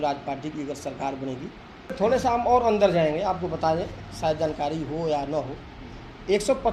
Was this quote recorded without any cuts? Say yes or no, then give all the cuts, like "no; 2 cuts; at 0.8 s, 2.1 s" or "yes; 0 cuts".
no; 1 cut; at 2.0 s